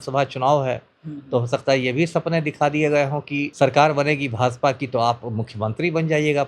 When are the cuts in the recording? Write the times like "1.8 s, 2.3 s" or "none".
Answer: 3.5 s